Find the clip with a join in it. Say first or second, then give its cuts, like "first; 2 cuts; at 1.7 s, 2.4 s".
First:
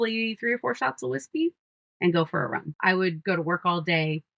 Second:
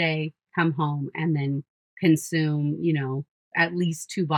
first; 1 cut; at 2.7 s